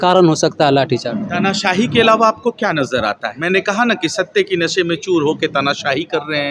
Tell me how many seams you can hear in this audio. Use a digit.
1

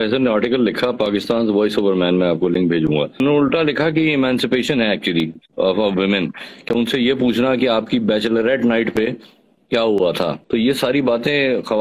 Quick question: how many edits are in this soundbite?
2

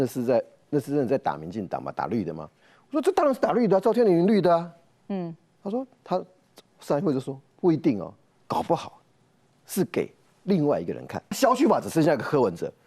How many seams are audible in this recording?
1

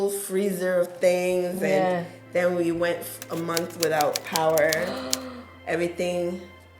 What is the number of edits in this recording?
0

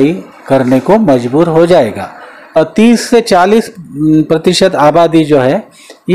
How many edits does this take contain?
1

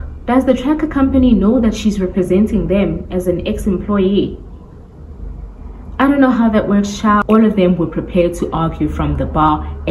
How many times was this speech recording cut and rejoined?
1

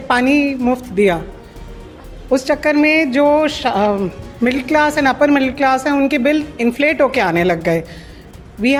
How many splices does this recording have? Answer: 0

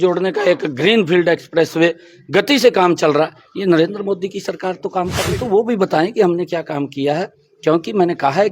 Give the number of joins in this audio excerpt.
1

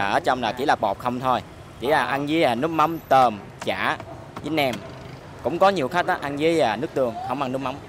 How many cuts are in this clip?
0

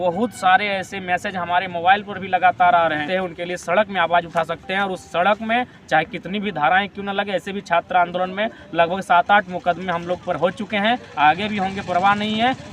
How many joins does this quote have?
1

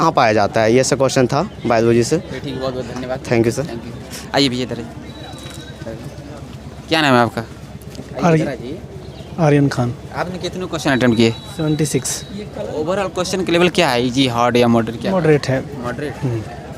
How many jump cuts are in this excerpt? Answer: 0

